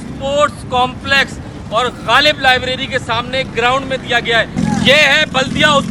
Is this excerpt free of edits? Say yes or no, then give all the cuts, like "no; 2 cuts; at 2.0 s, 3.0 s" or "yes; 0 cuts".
no; 1 cut; at 4.5 s